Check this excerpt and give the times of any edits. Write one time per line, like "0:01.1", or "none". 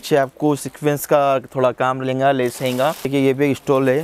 0:03.1